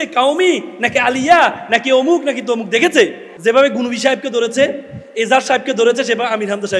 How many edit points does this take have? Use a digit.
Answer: 1